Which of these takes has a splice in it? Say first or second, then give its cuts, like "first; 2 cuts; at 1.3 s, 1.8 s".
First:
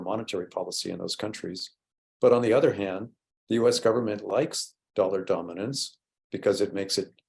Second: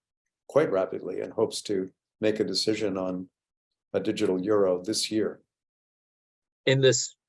second; 1 cut; at 6.1 s